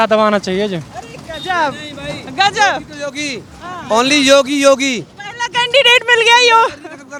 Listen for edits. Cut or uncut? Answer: uncut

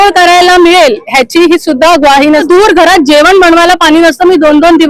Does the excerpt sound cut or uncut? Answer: cut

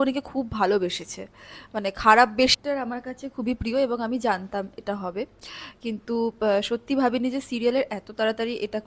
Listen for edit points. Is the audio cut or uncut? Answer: cut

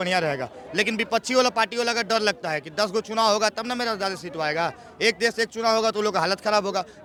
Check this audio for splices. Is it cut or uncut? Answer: uncut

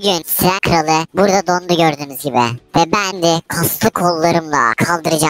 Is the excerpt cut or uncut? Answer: cut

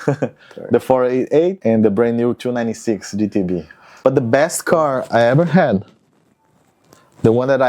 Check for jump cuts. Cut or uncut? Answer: cut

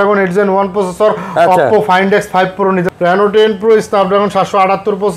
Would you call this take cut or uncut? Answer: cut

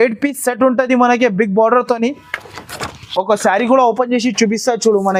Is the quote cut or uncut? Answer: uncut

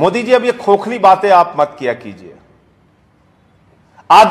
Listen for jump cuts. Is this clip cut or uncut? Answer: uncut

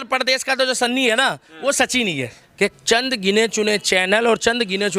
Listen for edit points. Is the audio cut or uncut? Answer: cut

